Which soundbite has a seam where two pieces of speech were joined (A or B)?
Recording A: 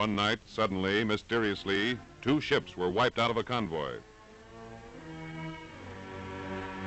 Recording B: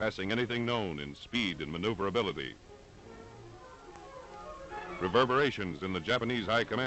A